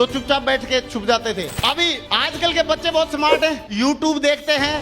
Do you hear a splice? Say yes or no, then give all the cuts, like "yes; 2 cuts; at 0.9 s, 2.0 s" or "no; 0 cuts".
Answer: yes; 1 cut; at 1.5 s